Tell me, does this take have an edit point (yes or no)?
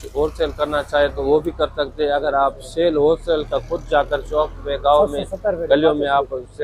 no